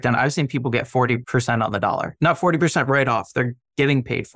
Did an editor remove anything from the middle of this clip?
yes; 2 cuts; at 1.2 s, 2.1 s

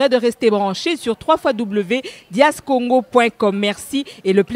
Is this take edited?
no; 0 cuts

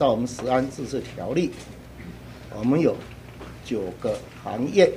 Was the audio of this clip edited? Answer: no; 0 cuts

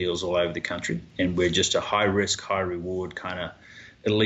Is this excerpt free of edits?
no; 1 cut; at 1.0 s

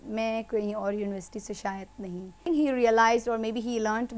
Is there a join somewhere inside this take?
yes; 1 cut; at 2.4 s

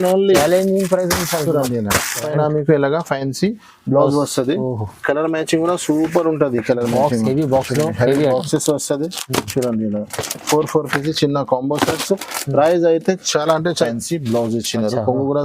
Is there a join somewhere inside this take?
yes; 2 cuts; at 2.3 s, 13.8 s

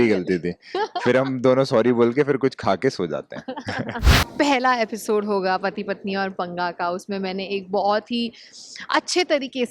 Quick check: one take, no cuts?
no; 1 cut; at 4.0 s

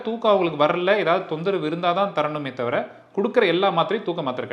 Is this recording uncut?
yes; 0 cuts

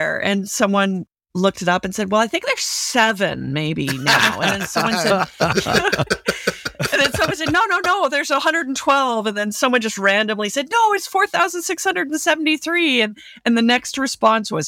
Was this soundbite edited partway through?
no; 0 cuts

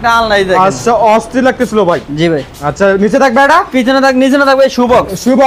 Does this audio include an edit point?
no; 0 cuts

